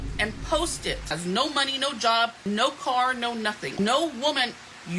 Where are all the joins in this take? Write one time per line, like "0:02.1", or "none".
0:01.1
0:02.4
0:03.8